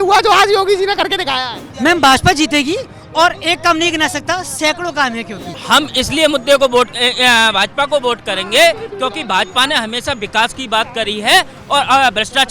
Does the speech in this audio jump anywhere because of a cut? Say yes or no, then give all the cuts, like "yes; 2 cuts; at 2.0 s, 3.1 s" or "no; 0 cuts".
yes; 2 cuts; at 1.6 s, 5.5 s